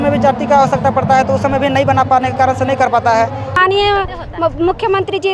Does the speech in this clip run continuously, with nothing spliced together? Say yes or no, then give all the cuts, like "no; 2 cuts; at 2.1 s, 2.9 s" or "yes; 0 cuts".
no; 1 cut; at 3.6 s